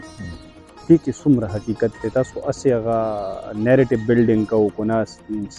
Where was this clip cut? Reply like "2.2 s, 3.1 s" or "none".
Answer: none